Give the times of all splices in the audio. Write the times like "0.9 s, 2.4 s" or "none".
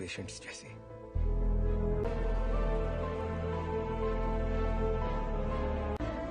2.1 s